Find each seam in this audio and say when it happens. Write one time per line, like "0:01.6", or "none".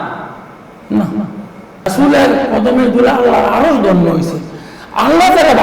0:01.9